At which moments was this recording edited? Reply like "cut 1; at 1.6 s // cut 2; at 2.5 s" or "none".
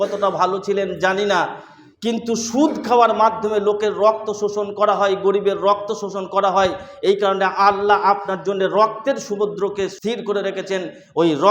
cut 1; at 10.0 s